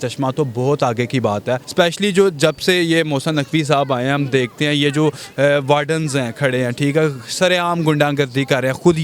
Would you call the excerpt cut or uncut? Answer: cut